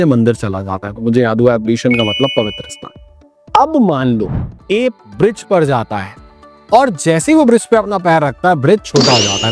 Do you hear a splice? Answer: yes; 1 cut; at 4.4 s

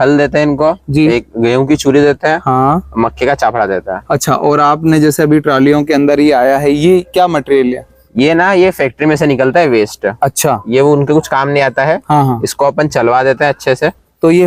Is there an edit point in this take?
no; 0 cuts

